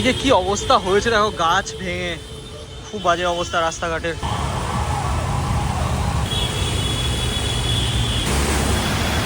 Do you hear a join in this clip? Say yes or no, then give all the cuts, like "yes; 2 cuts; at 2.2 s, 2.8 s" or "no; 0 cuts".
no; 0 cuts